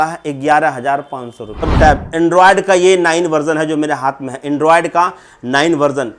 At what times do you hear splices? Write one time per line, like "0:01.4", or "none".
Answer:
0:01.7